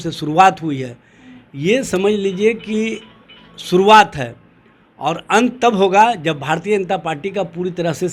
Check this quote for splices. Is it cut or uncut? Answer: uncut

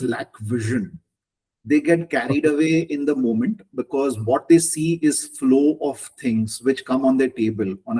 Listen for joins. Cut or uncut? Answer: uncut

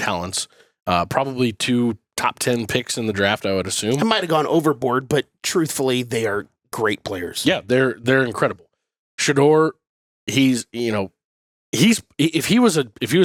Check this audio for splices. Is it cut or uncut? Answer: uncut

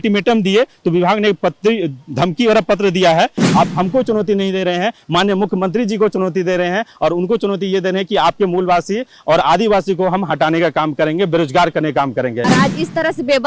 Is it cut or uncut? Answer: cut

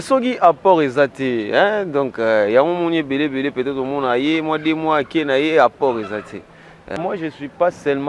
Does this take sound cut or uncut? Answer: cut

